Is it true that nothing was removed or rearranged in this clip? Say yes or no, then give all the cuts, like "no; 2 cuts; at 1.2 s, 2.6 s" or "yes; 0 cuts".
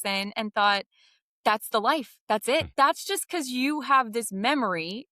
no; 1 cut; at 2.7 s